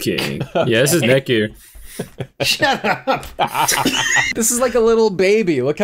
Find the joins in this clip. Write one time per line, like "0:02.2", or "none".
0:04.3